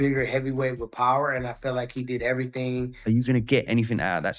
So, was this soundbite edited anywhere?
yes; 1 cut; at 2.9 s

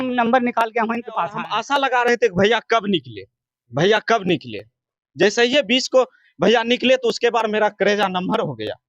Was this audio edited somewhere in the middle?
yes; 1 cut; at 1.5 s

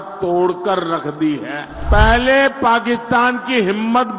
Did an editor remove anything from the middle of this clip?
yes; 1 cut; at 1.7 s

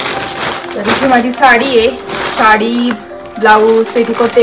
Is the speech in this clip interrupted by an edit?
no; 0 cuts

